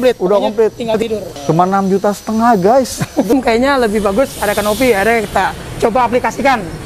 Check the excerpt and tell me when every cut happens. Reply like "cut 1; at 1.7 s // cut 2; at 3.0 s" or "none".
cut 1; at 3.3 s